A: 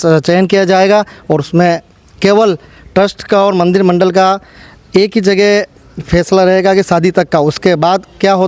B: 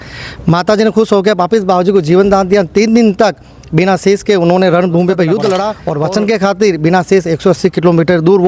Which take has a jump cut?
B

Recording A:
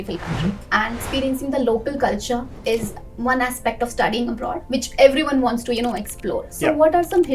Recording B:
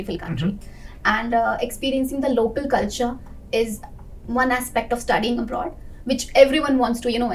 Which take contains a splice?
A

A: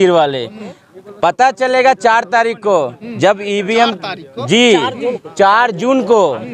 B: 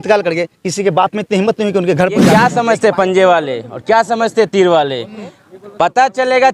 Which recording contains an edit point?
B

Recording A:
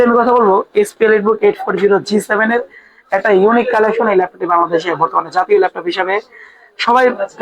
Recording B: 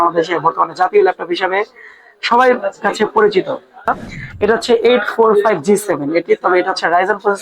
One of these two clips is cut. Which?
B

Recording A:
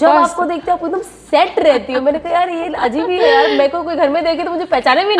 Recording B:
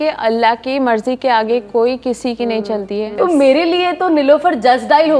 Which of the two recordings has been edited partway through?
B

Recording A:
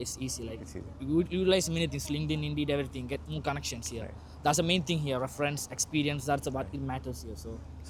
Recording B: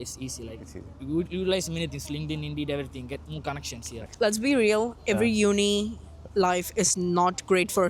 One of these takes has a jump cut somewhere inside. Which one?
B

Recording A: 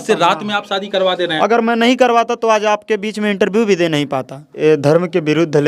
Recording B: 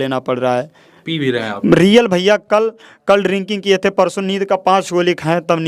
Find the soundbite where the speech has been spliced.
A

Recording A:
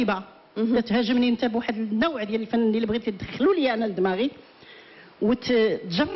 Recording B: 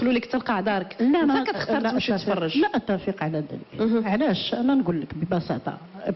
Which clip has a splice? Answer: A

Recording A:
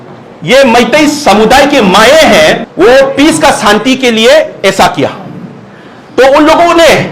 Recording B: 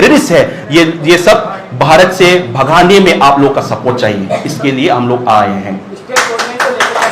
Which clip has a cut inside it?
A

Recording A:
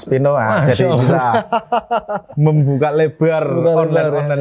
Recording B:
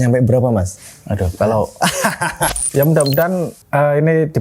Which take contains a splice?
B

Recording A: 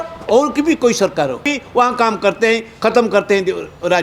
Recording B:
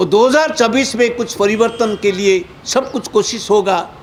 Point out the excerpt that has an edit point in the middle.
A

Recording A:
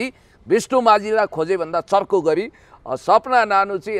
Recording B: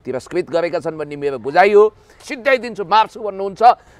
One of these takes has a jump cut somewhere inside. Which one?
B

